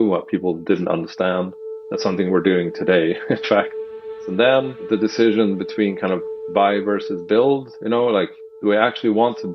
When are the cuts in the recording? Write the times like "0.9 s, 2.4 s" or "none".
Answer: 3.8 s, 4.8 s